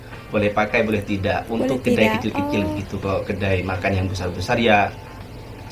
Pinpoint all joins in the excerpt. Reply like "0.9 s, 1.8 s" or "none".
none